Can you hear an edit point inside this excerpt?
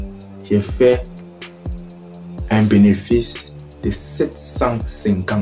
no; 0 cuts

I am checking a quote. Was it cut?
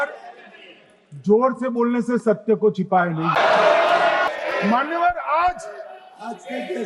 yes; 2 cuts; at 3.4 s, 4.3 s

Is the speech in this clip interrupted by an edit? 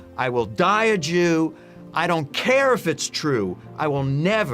no; 0 cuts

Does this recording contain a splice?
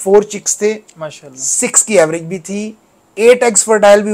no; 0 cuts

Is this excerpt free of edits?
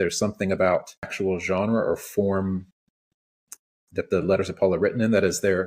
no; 1 cut; at 1.1 s

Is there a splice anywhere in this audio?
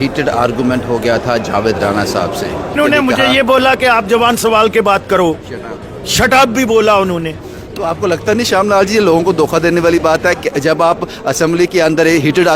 yes; 2 cuts; at 2.8 s, 7.8 s

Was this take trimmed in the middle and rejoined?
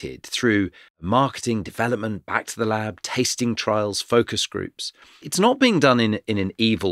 yes; 2 cuts; at 1.0 s, 5.3 s

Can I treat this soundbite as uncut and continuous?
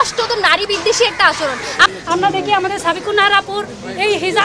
no; 1 cut; at 1.9 s

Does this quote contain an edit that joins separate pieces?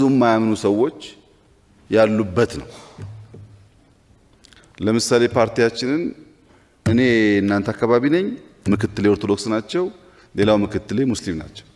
no; 0 cuts

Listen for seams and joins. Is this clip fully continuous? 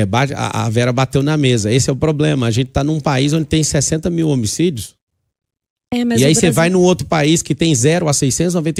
yes; 0 cuts

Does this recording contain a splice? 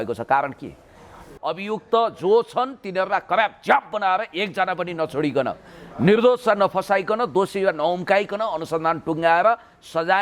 yes; 1 cut; at 1.3 s

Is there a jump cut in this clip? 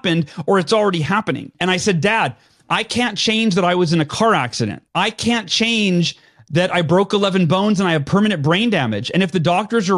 yes; 2 cuts; at 1.5 s, 4.8 s

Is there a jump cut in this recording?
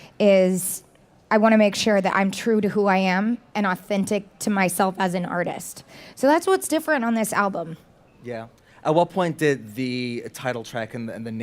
yes; 1 cut; at 1.4 s

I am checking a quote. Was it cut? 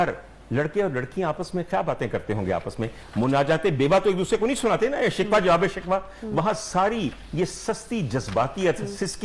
no; 0 cuts

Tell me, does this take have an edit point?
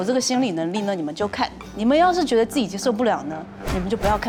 no; 0 cuts

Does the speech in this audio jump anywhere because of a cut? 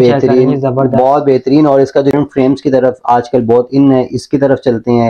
yes; 1 cut; at 2.1 s

